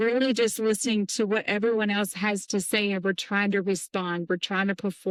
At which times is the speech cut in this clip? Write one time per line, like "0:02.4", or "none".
none